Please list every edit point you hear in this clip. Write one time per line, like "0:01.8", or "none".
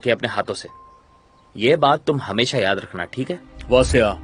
none